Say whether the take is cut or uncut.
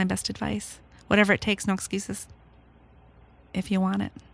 cut